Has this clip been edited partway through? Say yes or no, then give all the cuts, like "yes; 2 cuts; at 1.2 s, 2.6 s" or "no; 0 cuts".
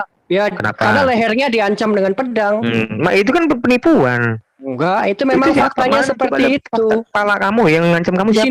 no; 0 cuts